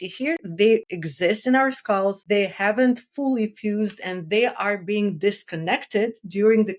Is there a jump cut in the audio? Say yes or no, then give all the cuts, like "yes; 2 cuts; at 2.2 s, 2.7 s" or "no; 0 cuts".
yes; 2 cuts; at 1.0 s, 2.2 s